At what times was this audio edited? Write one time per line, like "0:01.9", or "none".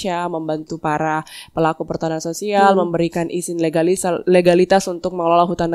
none